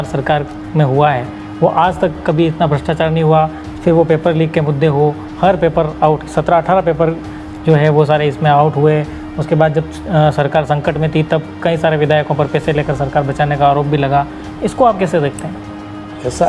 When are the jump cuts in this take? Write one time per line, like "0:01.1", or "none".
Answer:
none